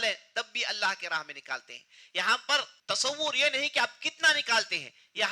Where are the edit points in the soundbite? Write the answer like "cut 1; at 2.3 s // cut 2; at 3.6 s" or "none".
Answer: cut 1; at 2.7 s